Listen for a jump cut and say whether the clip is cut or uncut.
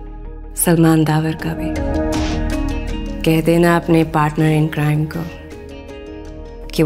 cut